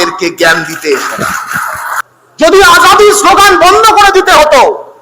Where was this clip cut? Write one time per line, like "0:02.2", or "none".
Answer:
0:02.0